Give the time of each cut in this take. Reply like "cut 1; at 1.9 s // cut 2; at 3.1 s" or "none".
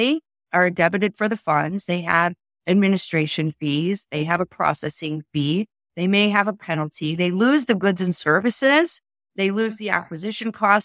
none